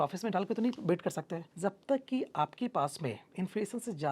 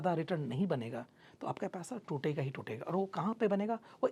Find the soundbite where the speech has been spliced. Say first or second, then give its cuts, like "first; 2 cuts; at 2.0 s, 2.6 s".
first; 1 cut; at 1.4 s